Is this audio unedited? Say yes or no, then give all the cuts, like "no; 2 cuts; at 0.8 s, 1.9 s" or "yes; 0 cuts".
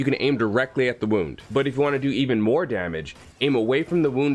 no; 1 cut; at 1.4 s